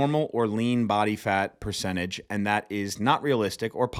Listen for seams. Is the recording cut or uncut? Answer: uncut